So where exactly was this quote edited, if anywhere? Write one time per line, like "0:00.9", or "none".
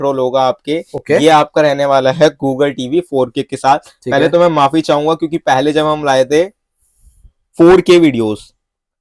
none